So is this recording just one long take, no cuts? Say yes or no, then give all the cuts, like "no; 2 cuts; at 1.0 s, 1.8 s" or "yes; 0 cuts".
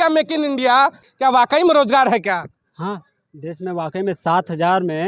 no; 1 cut; at 1.1 s